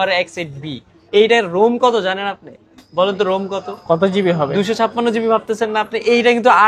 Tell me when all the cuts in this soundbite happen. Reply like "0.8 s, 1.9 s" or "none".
none